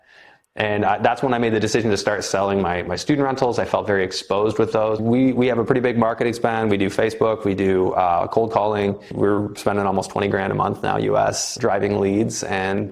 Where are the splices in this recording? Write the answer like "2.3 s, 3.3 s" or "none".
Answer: 5.0 s, 9.1 s, 11.5 s